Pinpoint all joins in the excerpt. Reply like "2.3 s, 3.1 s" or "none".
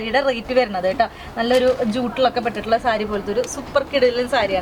none